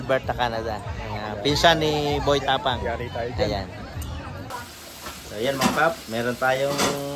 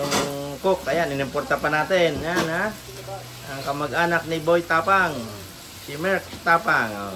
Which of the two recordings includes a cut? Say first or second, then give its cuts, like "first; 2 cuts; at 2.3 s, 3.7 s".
first; 1 cut; at 4.4 s